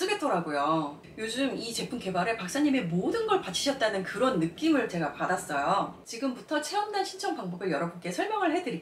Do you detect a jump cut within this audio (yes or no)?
yes